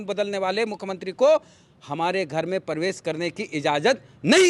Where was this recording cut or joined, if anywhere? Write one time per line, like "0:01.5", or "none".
none